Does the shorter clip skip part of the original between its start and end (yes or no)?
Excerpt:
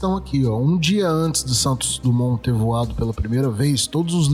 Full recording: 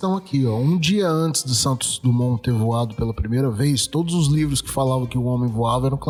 no